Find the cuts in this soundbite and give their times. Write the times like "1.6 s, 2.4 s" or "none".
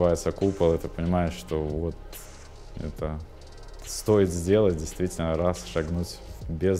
none